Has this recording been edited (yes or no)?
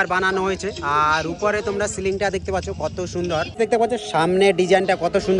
no